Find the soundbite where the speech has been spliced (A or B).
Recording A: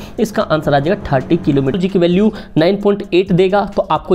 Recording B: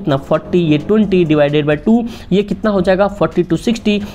A